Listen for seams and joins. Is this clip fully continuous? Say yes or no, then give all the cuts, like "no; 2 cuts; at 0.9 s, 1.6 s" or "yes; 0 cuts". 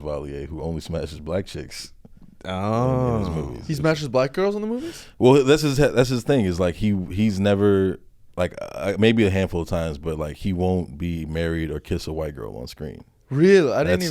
yes; 0 cuts